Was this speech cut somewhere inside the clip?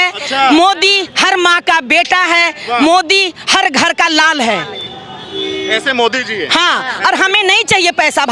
no; 0 cuts

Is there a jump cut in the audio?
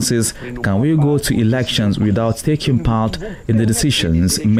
no; 0 cuts

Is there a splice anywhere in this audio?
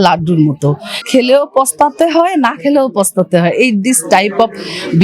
yes; 1 cut; at 1.0 s

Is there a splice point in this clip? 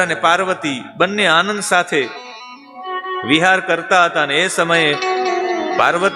no; 0 cuts

